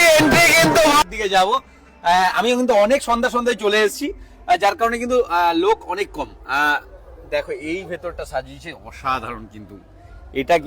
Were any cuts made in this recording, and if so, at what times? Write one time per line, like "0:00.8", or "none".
0:01.0